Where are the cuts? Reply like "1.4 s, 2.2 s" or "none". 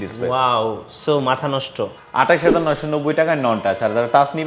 2.0 s